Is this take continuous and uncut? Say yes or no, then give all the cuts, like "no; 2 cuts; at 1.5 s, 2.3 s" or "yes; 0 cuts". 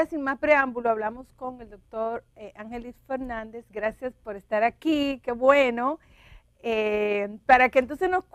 no; 1 cut; at 7.0 s